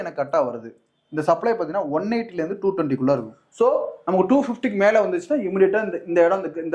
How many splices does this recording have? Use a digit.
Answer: 1